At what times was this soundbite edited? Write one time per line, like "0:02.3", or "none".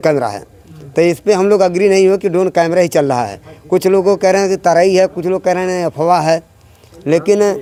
none